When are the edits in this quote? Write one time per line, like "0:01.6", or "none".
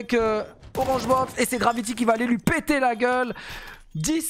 none